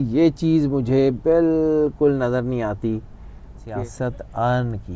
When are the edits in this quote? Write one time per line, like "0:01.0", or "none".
0:03.6